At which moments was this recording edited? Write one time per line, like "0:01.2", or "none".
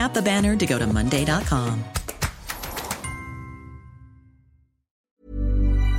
0:05.0